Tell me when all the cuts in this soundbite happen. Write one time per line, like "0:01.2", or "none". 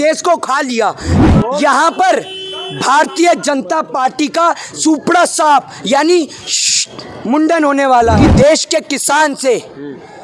0:01.1
0:08.2